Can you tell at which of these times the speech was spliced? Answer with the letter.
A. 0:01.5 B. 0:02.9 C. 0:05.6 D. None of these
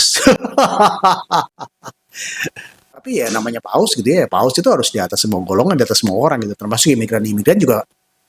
B